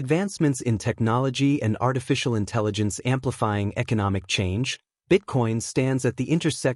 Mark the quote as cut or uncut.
uncut